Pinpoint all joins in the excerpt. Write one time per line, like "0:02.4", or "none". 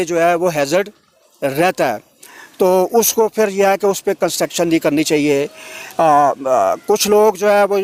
none

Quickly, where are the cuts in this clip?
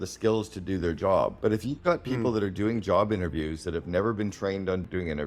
0:01.3

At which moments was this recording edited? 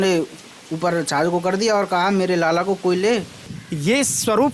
0:03.5

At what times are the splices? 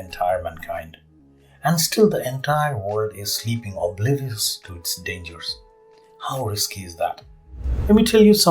0:07.6

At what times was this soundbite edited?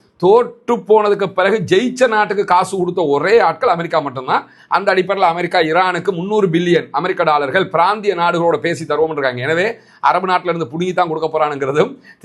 none

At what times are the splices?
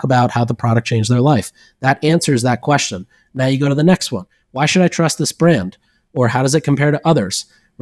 none

